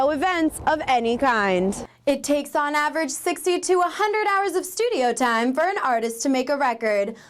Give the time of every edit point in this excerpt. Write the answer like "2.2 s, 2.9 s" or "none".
1.9 s